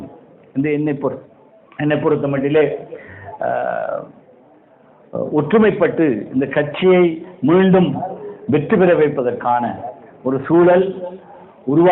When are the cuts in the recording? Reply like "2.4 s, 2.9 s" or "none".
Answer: none